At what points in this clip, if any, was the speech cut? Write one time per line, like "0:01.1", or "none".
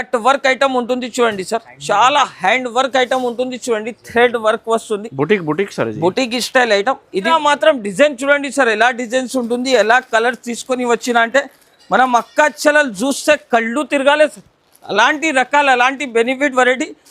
0:07.3